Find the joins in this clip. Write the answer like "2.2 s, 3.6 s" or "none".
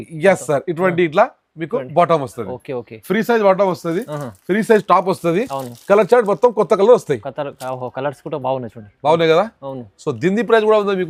none